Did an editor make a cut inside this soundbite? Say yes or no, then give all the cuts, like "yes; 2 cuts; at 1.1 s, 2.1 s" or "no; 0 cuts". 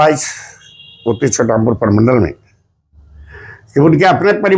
no; 0 cuts